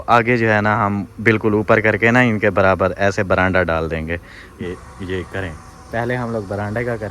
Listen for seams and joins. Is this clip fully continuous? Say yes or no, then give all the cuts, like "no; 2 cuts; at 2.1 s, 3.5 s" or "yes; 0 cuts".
no; 1 cut; at 4.6 s